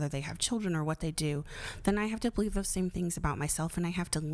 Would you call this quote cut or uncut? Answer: uncut